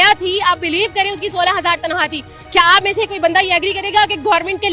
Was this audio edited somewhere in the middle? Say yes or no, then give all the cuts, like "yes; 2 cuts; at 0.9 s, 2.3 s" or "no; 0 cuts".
no; 0 cuts